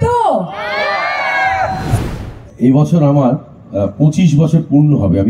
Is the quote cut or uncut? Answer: cut